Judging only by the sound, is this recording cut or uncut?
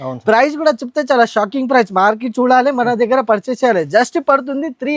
uncut